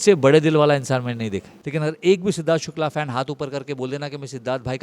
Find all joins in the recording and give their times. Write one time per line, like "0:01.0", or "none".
0:01.5

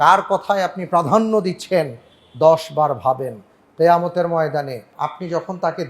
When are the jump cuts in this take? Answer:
0:04.9

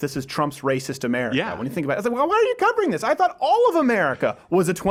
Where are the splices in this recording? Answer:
none

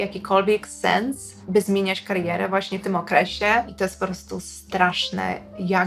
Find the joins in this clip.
0:03.7

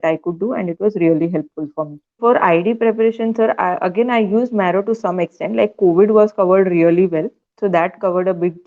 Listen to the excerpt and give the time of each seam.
0:02.2

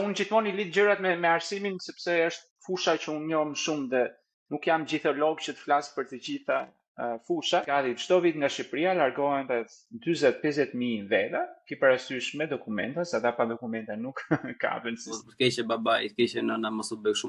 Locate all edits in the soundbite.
0:07.7
0:15.2

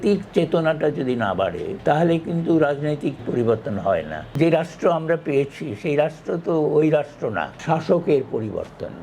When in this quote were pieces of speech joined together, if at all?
0:01.7
0:03.2
0:04.3
0:07.6

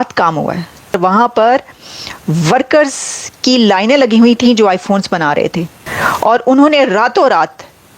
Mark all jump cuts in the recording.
0:00.9
0:05.8

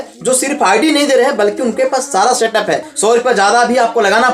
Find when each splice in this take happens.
0:02.9

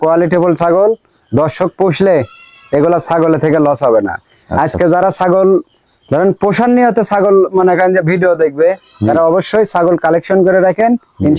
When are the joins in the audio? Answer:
none

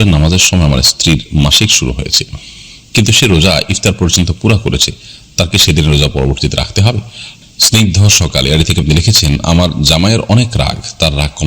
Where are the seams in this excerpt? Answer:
0:07.3

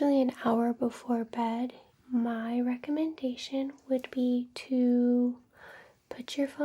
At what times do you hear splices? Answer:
0:01.9

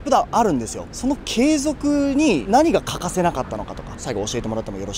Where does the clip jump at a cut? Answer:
0:04.0

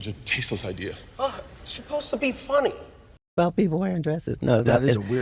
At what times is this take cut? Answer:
0:03.2

